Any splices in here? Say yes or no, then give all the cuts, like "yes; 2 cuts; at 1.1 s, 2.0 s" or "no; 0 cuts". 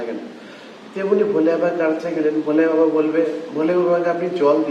no; 0 cuts